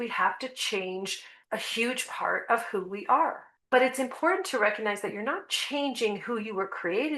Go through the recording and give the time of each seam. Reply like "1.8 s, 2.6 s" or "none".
1.3 s, 3.5 s

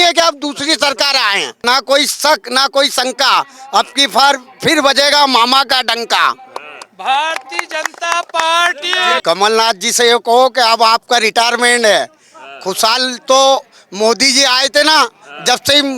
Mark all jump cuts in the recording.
1.6 s, 9.2 s

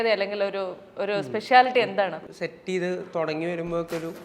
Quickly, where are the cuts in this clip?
2.2 s

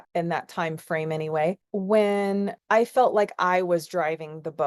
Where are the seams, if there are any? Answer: 1.6 s

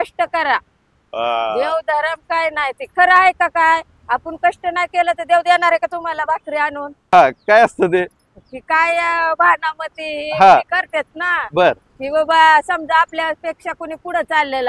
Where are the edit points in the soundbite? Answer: 7.0 s

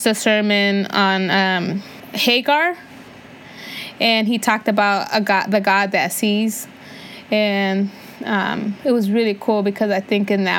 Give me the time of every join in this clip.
2.0 s

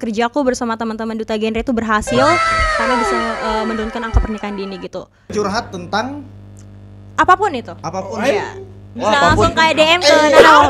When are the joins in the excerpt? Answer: 5.3 s

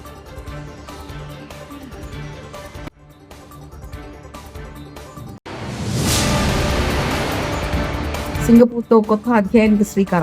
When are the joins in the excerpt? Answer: 8.4 s

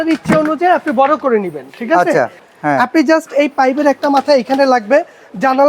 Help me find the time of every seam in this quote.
2.4 s

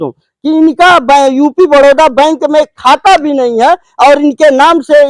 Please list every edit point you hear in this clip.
none

